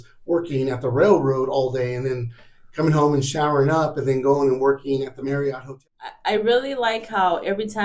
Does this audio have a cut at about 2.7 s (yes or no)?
no